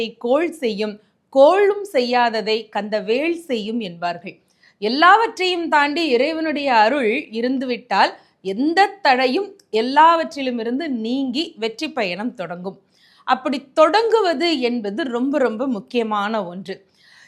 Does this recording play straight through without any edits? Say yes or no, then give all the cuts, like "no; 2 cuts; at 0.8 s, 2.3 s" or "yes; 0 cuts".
yes; 0 cuts